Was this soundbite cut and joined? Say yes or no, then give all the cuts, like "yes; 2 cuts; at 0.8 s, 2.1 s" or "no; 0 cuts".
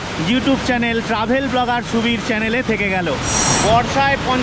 yes; 1 cut; at 3.4 s